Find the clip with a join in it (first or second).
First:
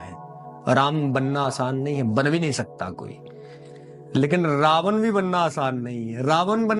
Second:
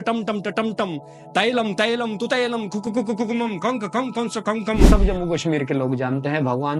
second